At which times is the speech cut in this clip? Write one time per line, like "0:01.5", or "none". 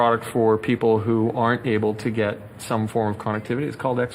none